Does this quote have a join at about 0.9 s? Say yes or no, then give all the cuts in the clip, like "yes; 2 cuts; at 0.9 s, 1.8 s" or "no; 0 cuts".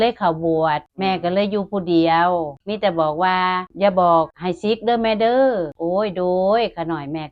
yes; 5 cuts; at 0.9 s, 2.6 s, 3.7 s, 4.4 s, 5.7 s